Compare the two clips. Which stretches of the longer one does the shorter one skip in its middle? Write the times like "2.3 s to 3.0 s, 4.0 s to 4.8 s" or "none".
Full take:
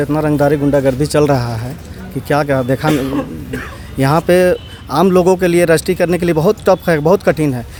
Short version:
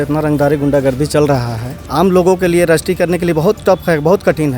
1.8 s to 4.8 s